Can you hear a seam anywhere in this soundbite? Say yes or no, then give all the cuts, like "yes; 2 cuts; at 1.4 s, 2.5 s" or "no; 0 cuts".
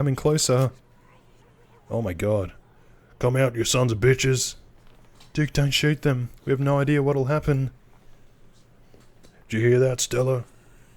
no; 0 cuts